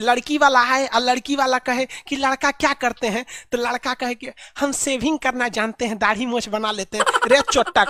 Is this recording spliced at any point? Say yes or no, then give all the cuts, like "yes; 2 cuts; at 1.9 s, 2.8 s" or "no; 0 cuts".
no; 0 cuts